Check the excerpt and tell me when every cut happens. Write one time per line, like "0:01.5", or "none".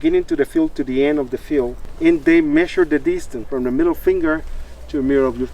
0:01.8
0:03.4